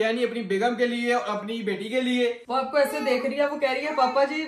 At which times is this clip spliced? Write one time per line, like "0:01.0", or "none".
0:02.5

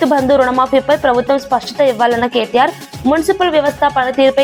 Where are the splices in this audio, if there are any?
none

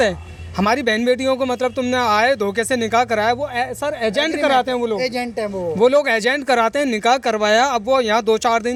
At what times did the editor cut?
none

